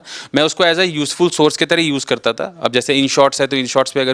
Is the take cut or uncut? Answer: uncut